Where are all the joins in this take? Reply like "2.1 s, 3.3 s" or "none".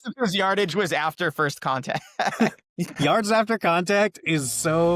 none